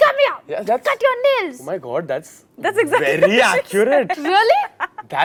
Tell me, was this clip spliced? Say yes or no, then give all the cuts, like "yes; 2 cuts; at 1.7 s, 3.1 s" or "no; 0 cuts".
no; 0 cuts